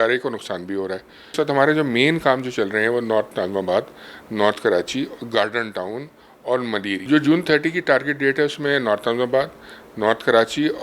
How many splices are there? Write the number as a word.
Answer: two